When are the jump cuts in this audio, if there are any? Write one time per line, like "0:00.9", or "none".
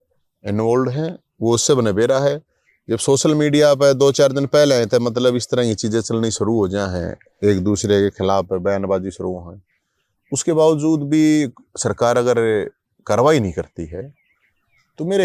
none